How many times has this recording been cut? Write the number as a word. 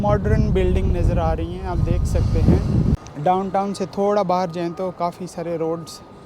one